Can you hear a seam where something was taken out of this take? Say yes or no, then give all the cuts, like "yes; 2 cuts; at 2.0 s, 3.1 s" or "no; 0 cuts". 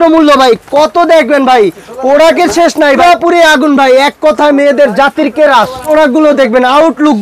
yes; 2 cuts; at 3.0 s, 5.8 s